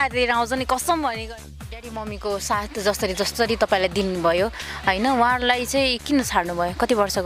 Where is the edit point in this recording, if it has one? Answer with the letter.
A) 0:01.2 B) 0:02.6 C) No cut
A